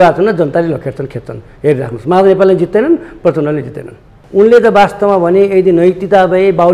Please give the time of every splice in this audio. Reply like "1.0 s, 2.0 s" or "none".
4.1 s